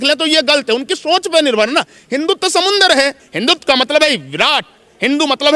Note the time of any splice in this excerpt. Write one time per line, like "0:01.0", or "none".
0:03.3